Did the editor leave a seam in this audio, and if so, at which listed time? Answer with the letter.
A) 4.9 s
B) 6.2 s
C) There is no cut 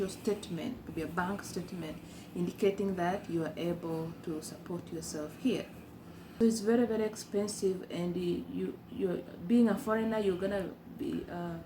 B